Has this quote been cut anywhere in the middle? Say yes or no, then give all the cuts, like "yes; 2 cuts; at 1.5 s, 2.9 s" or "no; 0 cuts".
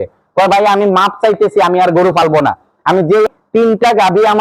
yes; 1 cut; at 3.3 s